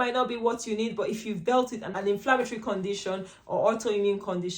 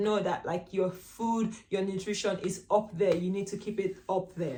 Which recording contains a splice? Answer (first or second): first